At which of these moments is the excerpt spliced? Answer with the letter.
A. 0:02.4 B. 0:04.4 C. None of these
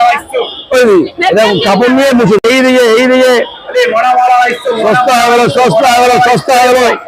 A